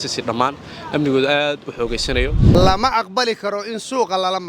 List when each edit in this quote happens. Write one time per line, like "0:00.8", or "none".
0:02.5

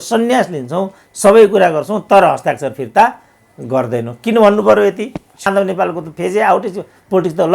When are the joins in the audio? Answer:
0:05.5

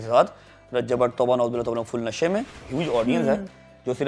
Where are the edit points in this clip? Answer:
0:02.5

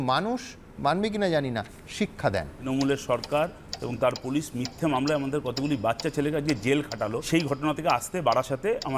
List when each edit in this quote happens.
0:02.6
0:07.2

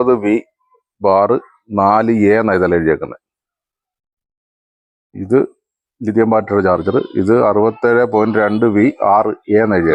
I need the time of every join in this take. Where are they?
none

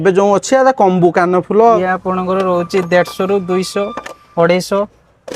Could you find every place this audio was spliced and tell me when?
0:01.8

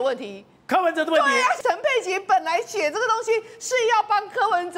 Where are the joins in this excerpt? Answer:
0:01.6

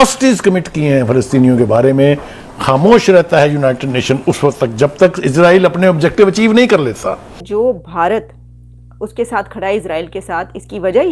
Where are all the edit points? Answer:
0:07.4

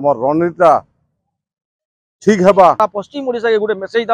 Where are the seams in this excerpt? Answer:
0:02.8

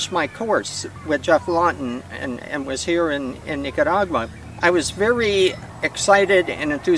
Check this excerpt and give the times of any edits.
0:00.9
0:04.4
0:05.6

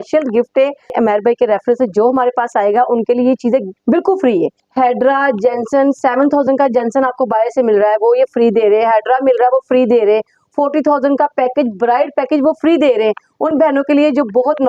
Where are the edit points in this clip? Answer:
0:00.9
0:03.7
0:04.6

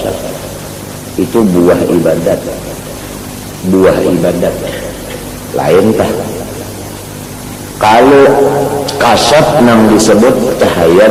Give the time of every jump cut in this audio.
none

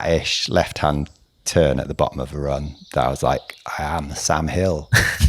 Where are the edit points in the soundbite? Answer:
none

